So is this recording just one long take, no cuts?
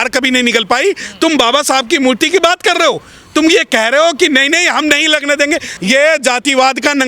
no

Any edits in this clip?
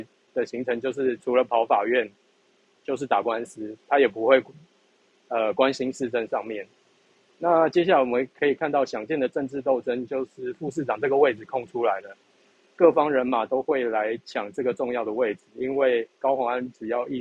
no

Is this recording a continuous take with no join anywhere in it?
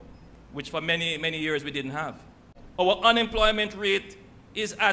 no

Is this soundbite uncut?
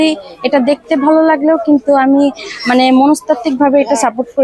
yes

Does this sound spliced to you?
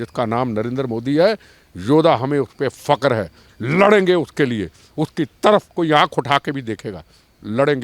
no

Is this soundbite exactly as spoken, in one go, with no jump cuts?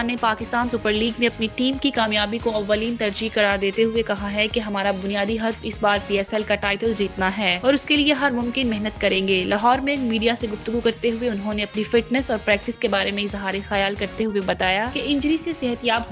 yes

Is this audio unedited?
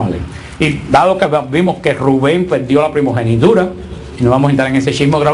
no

